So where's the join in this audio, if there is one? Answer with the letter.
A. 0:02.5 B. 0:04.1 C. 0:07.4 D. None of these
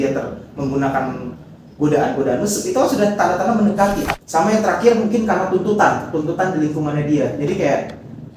B